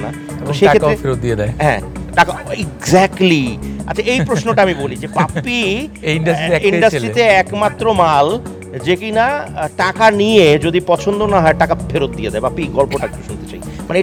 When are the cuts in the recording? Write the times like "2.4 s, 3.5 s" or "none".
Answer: none

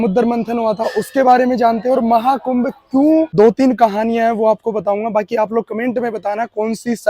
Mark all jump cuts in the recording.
3.3 s

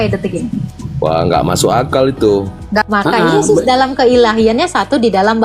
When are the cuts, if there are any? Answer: 2.8 s

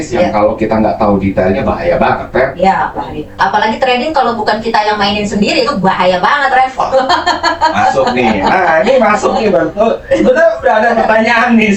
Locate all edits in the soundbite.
none

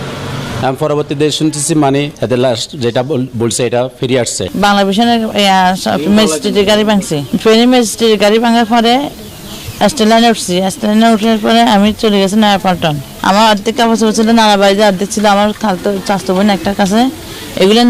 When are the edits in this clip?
2.1 s, 4.4 s, 13.1 s

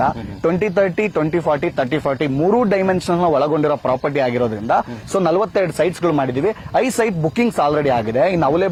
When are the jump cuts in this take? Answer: none

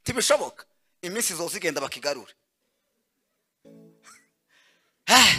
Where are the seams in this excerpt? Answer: none

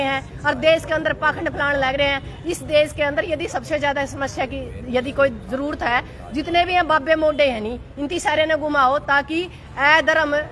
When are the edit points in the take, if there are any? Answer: none

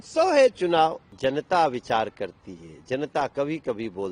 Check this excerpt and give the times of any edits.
1.1 s

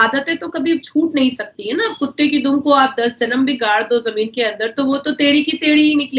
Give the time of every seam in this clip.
none

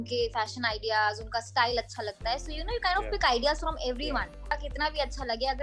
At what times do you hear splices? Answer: 4.5 s

